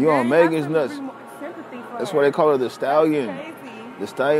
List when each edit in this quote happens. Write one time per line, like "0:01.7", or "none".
none